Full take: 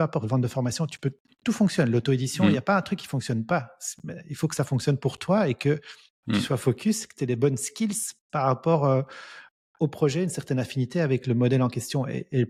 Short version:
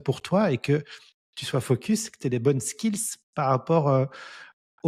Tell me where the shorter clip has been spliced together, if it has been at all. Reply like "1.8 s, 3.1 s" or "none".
none